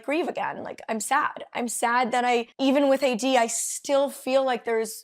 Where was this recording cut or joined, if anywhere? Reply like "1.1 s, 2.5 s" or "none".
2.5 s